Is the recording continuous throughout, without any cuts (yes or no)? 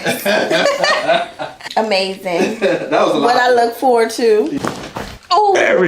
no